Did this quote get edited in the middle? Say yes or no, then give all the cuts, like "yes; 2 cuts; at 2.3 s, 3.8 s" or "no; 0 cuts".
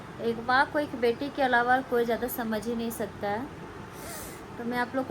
no; 0 cuts